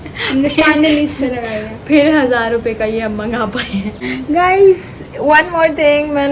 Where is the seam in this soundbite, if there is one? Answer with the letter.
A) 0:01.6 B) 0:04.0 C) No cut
B